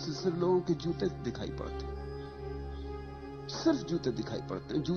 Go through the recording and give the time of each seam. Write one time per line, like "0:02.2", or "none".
0:01.5
0:03.6